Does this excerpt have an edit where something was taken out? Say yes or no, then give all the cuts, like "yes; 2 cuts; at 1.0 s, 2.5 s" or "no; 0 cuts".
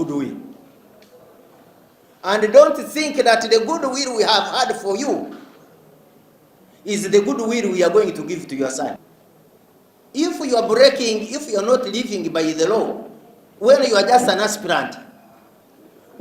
yes; 1 cut; at 9.1 s